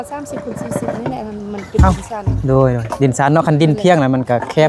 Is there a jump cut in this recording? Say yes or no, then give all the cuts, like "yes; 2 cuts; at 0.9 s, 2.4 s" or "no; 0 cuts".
no; 0 cuts